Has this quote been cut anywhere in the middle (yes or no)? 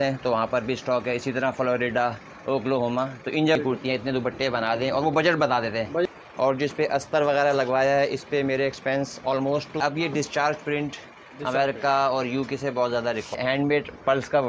yes